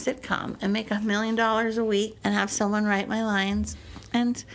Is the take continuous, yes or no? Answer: no